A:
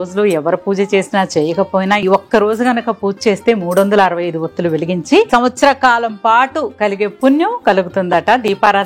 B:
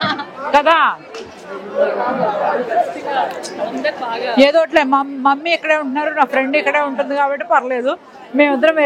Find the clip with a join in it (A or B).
A